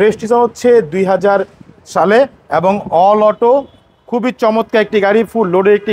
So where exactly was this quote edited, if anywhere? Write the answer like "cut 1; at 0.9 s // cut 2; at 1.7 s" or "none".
none

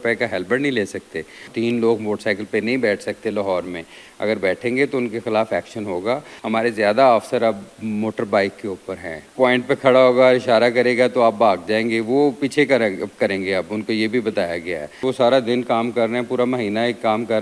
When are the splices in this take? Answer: cut 1; at 1.5 s // cut 2; at 6.3 s // cut 3; at 9.3 s // cut 4; at 15.0 s

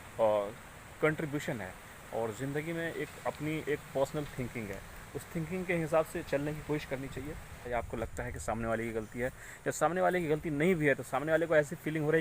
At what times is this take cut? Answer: cut 1; at 7.7 s

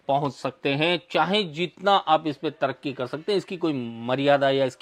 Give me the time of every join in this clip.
none

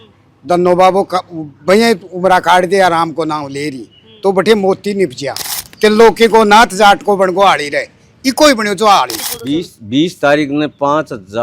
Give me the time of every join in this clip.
cut 1; at 5.6 s // cut 2; at 9.2 s

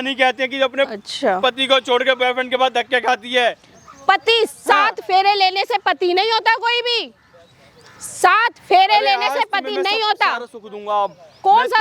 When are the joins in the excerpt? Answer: none

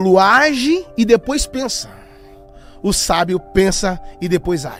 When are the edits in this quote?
none

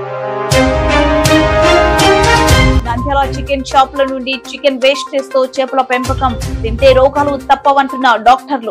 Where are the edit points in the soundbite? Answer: none

